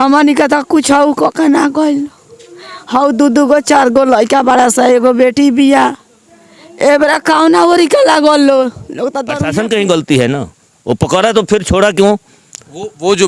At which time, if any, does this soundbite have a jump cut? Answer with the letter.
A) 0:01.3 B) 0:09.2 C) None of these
B